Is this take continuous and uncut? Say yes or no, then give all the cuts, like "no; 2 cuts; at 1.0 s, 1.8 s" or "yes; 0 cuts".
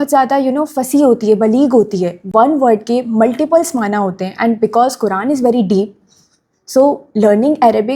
yes; 0 cuts